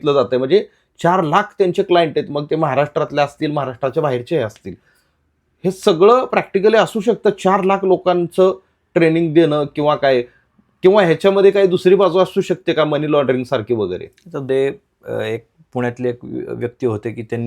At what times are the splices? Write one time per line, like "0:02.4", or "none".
0:14.5